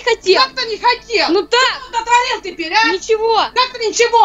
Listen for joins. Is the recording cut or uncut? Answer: uncut